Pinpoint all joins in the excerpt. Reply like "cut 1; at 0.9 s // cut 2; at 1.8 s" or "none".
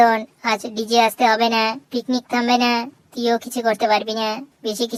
none